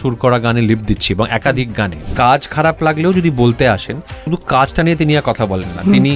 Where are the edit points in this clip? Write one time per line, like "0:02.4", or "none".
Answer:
0:02.0
0:04.2